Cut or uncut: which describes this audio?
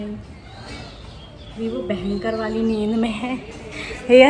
uncut